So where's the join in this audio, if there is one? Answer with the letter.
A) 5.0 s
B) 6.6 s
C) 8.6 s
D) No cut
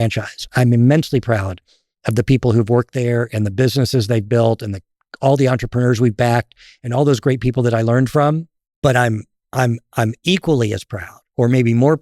C